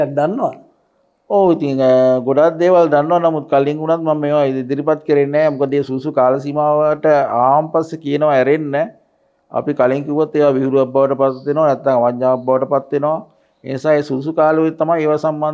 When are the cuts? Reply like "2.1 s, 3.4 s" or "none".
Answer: none